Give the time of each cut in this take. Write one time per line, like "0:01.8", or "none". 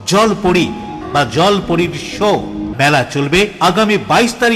0:01.0
0:02.7